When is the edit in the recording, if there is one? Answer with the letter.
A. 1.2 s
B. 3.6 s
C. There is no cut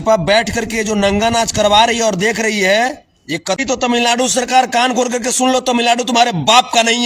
B